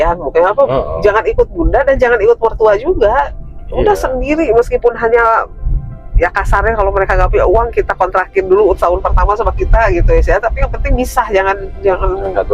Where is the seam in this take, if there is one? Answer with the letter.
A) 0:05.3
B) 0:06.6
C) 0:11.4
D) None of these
D